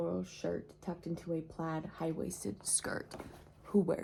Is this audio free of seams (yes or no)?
yes